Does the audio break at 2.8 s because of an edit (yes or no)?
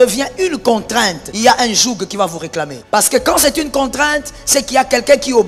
yes